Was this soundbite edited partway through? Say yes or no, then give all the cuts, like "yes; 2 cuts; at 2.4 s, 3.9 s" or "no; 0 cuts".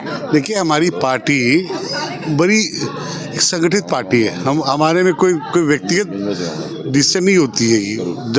no; 0 cuts